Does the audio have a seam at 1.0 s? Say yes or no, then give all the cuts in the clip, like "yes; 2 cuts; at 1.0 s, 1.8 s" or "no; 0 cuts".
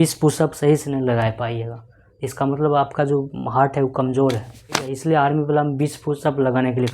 no; 1 cut; at 4.9 s